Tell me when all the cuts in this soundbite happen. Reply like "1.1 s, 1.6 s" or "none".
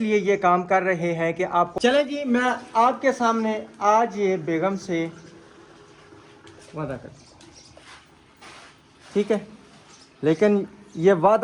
1.7 s